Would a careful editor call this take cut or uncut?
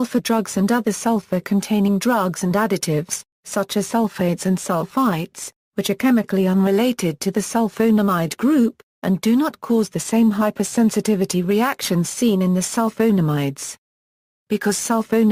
cut